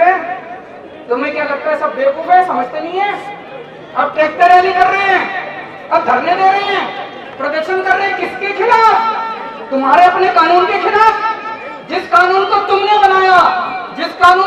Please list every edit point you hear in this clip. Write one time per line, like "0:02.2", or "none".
none